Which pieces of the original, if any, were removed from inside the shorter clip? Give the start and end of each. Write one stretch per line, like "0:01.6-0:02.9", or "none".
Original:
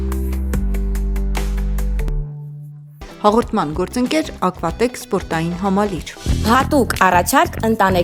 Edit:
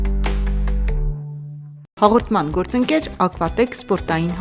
0:02.1-0:02.2